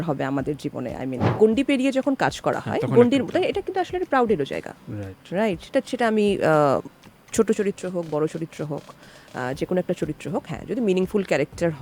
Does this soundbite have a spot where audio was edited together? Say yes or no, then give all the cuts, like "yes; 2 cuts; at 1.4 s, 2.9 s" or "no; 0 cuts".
yes; 1 cut; at 1.3 s